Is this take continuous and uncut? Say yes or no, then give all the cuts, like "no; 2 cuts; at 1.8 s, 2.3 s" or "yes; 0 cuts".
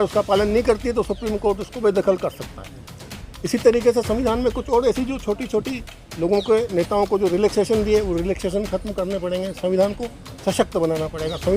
yes; 0 cuts